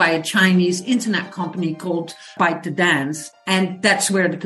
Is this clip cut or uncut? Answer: cut